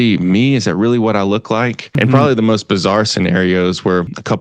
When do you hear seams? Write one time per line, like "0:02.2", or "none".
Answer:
0:02.0